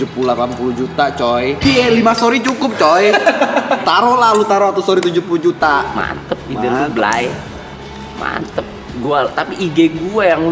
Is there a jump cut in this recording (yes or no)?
yes